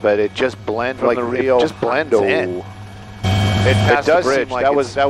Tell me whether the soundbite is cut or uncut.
uncut